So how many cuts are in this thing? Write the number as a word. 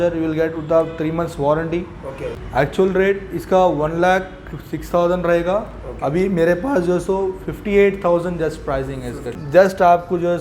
two